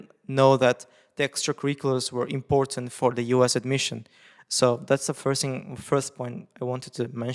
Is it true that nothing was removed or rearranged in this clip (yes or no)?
yes